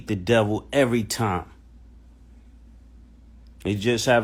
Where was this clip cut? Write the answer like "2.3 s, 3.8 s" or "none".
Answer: none